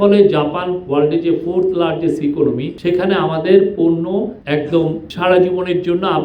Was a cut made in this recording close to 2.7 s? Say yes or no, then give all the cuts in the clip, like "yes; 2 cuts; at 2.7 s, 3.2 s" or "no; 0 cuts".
yes; 3 cuts; at 2.7 s, 4.4 s, 5.1 s